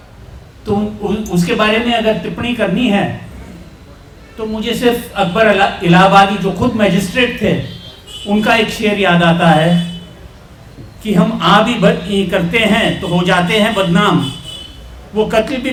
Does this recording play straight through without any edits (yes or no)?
yes